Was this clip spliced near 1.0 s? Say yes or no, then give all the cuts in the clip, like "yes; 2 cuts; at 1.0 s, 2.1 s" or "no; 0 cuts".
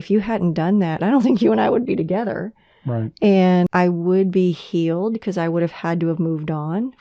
yes; 2 cuts; at 1.0 s, 3.7 s